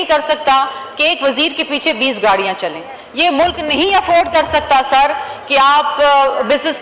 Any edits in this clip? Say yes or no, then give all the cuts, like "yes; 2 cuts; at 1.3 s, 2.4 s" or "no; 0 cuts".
no; 0 cuts